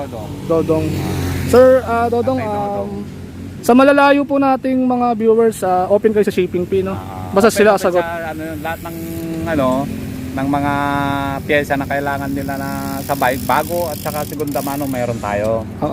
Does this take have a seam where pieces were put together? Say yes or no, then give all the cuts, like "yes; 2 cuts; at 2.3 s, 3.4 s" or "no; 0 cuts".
no; 0 cuts